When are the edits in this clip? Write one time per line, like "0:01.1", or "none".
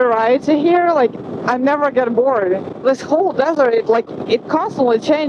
none